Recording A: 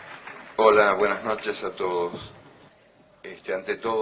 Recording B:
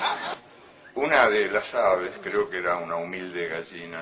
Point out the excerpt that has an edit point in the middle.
B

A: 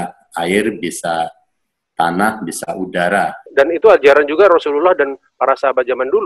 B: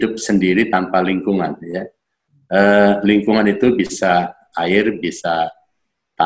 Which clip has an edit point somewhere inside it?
A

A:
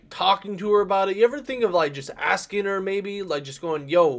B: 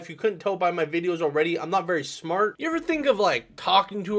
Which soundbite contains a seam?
B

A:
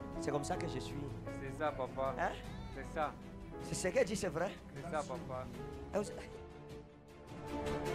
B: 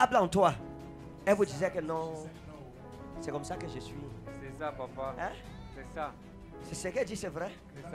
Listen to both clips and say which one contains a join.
A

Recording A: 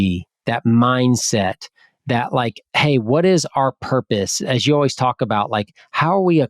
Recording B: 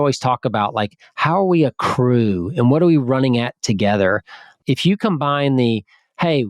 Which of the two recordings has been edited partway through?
B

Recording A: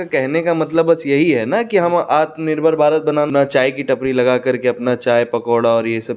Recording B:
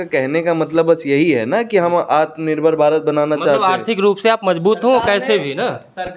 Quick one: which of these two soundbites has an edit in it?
A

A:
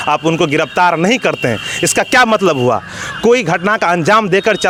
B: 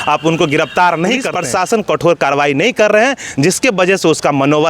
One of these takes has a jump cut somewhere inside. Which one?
B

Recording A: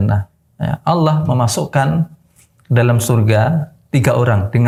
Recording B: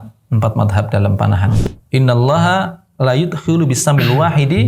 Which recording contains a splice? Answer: B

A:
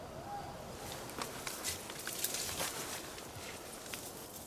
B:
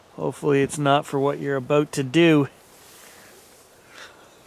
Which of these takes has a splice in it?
A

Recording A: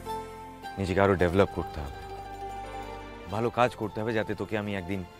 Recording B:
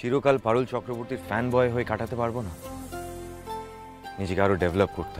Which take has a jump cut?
A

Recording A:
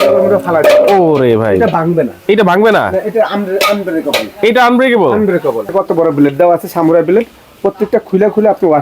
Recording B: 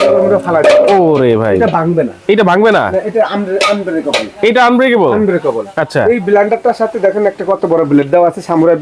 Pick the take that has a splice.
A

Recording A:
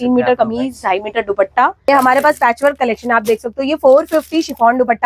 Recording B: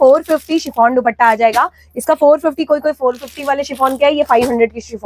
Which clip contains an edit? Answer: A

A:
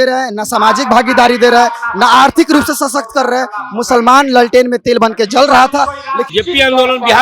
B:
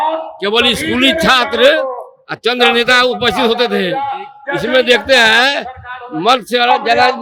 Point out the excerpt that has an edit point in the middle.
A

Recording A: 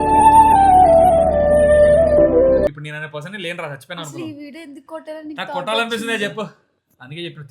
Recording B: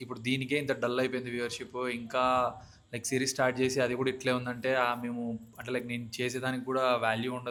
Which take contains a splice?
A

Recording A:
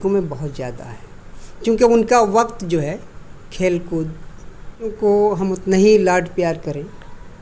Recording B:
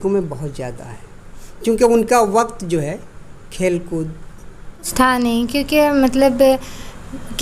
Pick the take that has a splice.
B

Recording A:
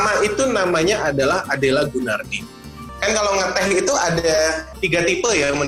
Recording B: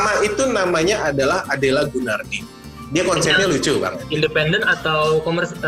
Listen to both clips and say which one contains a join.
A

